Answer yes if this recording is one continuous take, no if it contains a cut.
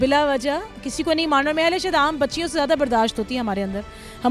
yes